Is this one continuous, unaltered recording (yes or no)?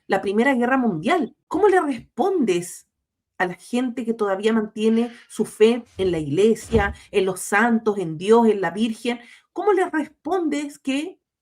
no